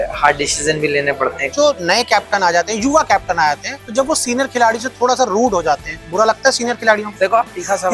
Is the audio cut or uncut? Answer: cut